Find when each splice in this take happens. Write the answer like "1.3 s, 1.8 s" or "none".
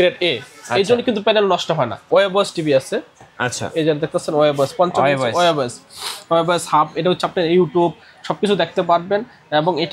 2.1 s